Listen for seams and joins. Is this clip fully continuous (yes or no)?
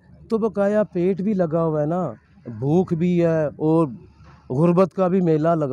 yes